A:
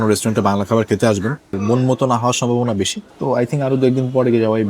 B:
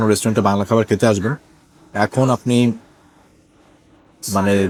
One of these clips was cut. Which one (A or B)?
A